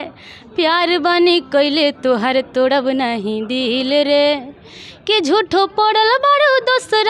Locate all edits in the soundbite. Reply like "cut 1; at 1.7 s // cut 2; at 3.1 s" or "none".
none